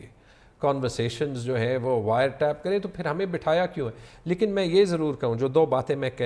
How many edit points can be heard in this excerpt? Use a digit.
0